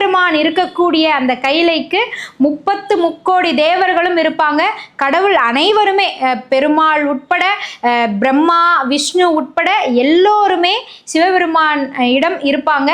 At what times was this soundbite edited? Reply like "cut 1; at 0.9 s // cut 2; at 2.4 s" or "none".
none